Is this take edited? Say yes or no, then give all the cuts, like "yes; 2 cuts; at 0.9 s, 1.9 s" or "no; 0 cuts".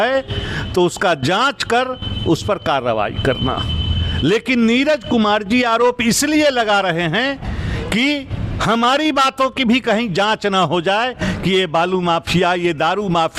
no; 0 cuts